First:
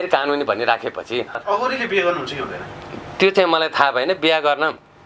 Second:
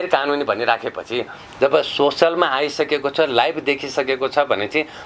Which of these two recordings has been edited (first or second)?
first